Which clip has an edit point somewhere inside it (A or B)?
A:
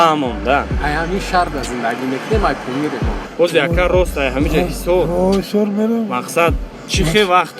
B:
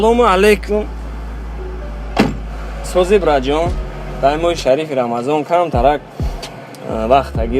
A